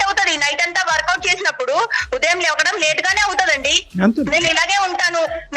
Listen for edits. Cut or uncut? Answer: uncut